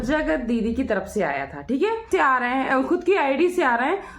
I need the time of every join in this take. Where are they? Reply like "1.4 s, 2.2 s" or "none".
2.0 s